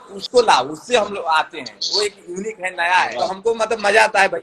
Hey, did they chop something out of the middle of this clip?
yes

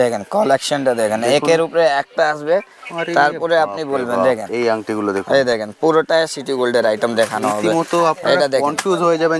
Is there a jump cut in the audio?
no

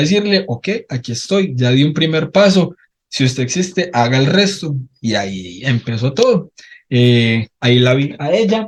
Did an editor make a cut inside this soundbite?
no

